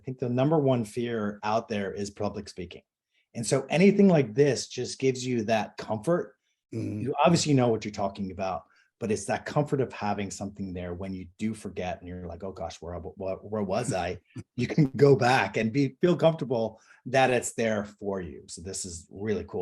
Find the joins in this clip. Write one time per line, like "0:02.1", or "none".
0:18.4